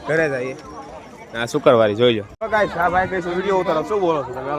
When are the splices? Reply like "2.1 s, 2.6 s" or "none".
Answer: 2.3 s